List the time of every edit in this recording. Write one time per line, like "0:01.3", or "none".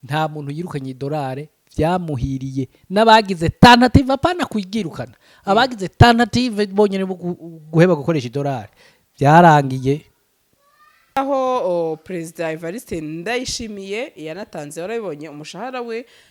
0:11.2